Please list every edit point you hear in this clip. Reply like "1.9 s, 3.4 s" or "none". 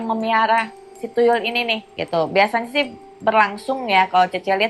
1.9 s